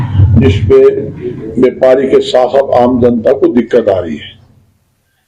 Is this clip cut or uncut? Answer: uncut